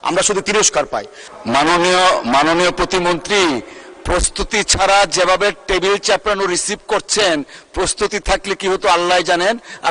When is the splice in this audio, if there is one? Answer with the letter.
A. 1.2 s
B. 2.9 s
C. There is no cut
A